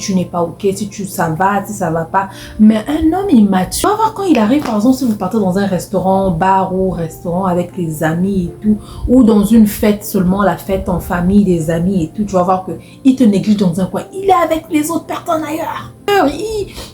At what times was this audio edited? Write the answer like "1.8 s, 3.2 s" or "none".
3.9 s, 16.1 s